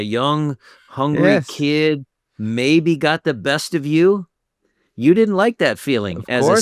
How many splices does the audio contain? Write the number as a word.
zero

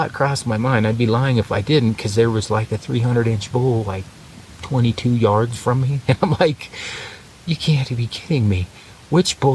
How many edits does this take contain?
zero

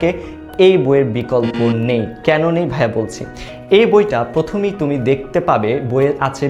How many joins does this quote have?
zero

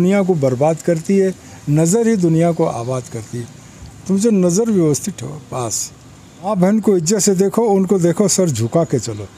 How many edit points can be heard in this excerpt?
one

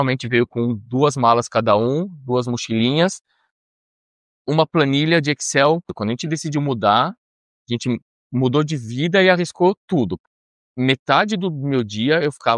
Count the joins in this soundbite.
two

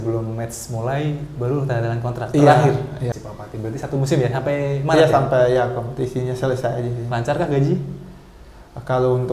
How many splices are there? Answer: one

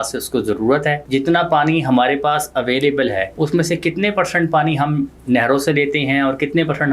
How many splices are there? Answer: two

